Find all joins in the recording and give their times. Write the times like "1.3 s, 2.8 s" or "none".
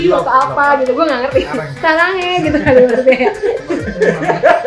none